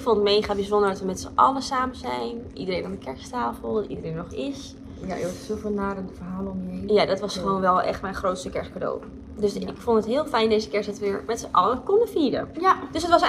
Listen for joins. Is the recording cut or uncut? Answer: uncut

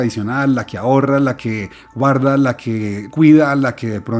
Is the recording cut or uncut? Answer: cut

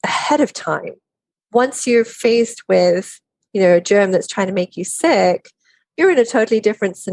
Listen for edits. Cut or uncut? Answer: uncut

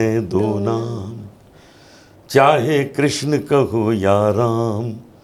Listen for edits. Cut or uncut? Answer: uncut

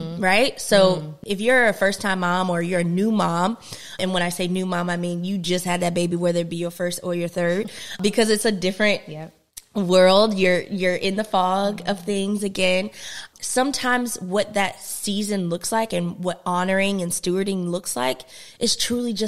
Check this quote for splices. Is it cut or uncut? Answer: cut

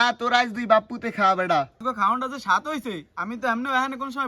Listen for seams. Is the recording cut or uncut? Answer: cut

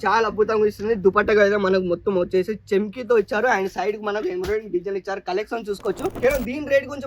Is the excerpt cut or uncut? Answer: cut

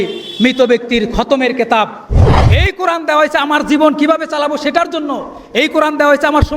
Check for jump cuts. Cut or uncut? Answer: cut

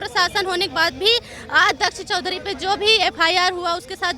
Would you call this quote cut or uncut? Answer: uncut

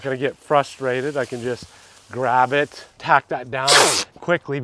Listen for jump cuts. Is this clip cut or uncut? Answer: cut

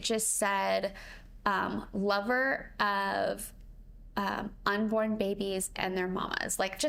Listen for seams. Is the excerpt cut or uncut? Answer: uncut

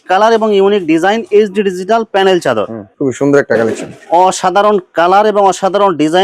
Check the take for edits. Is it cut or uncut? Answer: cut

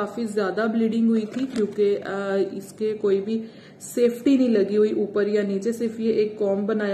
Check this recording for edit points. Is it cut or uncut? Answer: uncut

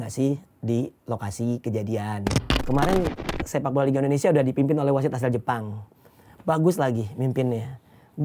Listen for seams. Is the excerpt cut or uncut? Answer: cut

